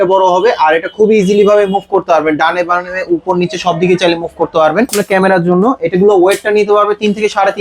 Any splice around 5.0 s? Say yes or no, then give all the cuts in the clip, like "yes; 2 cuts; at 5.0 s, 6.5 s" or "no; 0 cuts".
yes; 1 cut; at 5.0 s